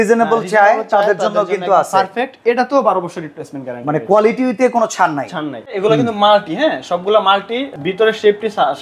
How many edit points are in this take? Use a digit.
2